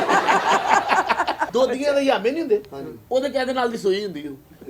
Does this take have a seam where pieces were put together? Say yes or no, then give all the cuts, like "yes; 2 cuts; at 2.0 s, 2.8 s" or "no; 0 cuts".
yes; 1 cut; at 1.5 s